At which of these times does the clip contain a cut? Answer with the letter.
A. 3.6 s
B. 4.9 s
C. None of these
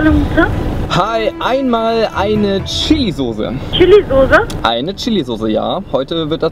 A